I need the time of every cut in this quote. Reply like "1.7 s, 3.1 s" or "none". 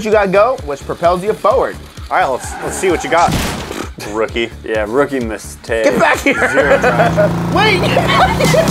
1.8 s, 7.3 s